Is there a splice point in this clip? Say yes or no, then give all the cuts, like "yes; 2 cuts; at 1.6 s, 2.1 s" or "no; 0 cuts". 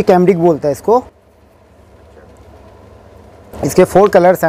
no; 0 cuts